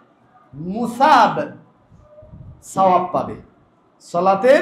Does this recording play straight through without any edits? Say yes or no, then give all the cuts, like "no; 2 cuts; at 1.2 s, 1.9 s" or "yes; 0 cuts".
yes; 0 cuts